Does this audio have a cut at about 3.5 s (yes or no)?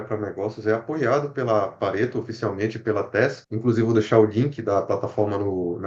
yes